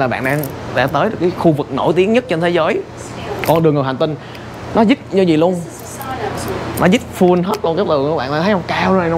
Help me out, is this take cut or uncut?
uncut